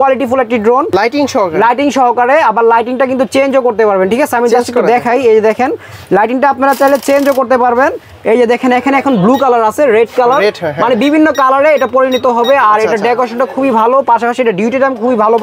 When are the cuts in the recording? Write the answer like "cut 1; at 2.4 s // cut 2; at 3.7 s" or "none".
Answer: none